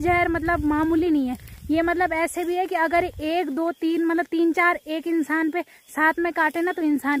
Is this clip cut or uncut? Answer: uncut